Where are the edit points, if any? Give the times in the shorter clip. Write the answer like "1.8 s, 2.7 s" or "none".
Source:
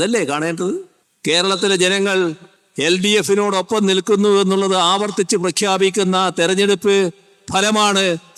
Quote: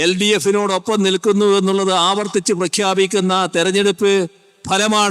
none